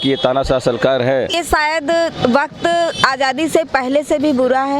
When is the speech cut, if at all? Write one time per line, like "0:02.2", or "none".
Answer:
0:01.4